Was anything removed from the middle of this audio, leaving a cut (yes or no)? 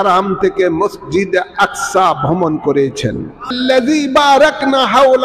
yes